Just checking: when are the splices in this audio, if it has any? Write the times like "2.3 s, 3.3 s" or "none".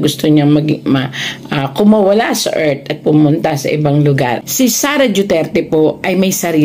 4.5 s